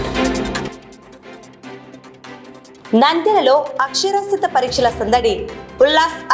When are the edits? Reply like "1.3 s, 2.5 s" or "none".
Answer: 2.7 s